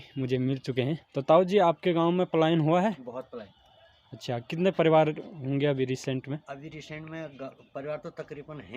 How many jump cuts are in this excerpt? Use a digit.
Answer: 1